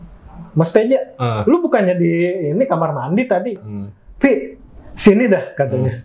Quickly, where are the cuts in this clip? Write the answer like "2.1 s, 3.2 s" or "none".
3.7 s